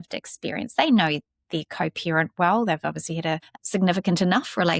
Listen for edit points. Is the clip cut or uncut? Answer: cut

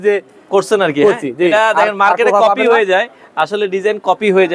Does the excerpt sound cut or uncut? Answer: uncut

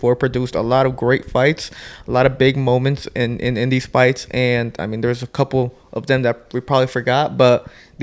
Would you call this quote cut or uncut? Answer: uncut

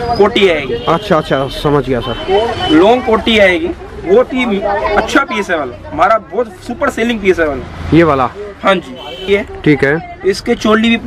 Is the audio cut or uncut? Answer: cut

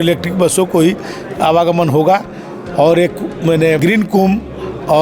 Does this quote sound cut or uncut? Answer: cut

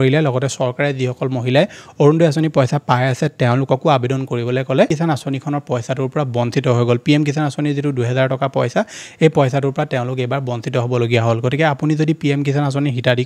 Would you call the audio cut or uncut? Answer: cut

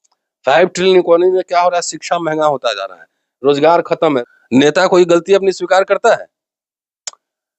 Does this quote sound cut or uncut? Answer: cut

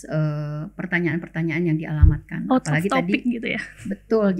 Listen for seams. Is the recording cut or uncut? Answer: uncut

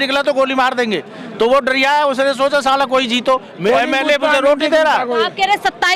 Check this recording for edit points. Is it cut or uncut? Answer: uncut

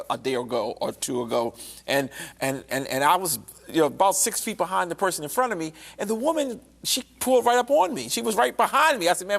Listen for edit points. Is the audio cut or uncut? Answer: uncut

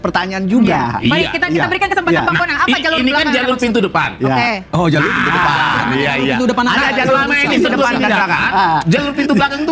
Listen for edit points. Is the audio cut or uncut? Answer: uncut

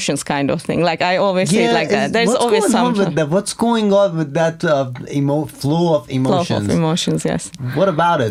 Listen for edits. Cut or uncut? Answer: uncut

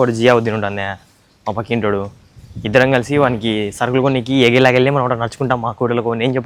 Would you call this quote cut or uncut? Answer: uncut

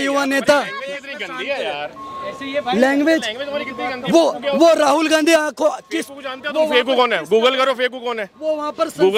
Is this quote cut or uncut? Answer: uncut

